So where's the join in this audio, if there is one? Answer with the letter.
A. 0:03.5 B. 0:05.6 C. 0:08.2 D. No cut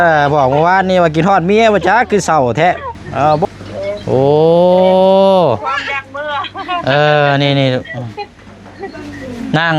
A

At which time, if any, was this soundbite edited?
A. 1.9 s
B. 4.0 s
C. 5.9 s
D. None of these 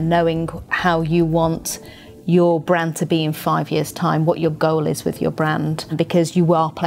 C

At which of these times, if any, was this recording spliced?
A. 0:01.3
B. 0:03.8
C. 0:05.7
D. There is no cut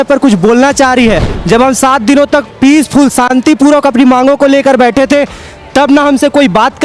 A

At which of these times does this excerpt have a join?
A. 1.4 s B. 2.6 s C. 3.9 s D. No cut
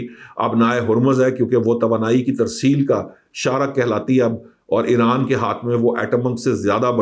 D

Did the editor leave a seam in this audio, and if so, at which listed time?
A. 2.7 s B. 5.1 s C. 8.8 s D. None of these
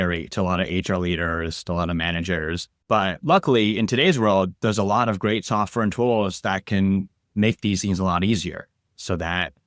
A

